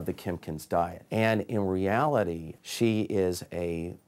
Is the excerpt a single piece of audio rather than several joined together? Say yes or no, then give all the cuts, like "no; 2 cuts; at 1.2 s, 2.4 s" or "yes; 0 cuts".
no; 2 cuts; at 1.0 s, 2.5 s